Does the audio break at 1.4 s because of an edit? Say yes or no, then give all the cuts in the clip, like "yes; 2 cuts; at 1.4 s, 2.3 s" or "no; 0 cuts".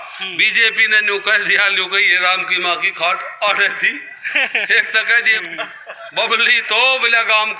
no; 1 cut; at 5.4 s